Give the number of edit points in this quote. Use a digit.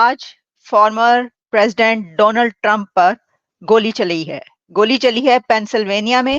0